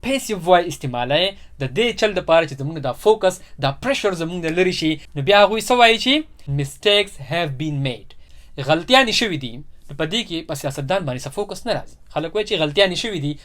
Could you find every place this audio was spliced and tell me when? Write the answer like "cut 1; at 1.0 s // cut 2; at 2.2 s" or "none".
cut 1; at 6.4 s // cut 2; at 8.1 s